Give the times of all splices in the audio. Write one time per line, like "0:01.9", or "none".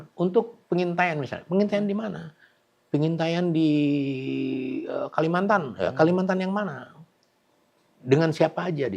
none